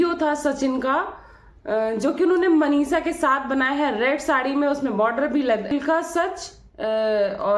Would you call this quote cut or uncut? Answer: cut